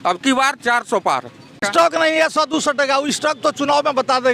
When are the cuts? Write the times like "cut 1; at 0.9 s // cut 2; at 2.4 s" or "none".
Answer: cut 1; at 1.5 s